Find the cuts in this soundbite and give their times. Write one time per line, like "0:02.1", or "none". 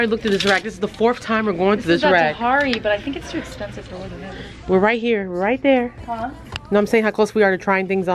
none